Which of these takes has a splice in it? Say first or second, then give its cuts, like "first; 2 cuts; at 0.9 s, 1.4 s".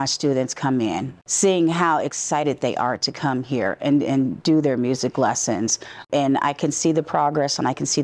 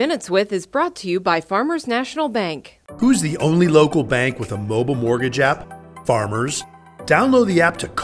first; 2 cuts; at 1.1 s, 6.1 s